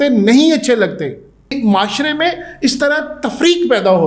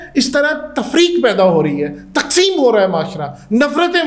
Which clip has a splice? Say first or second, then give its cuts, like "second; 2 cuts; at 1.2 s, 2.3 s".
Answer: first; 1 cut; at 1.6 s